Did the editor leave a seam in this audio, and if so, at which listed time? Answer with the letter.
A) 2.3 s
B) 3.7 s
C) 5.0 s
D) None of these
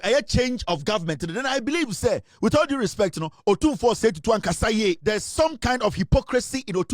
C